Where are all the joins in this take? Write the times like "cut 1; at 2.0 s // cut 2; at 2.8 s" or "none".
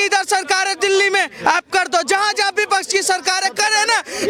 none